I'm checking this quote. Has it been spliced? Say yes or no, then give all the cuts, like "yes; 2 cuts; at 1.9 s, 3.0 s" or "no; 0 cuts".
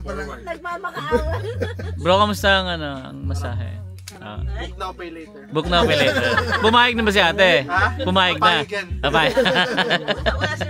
no; 0 cuts